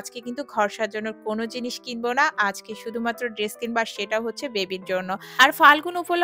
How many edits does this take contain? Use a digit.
1